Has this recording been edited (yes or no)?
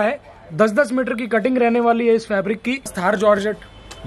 yes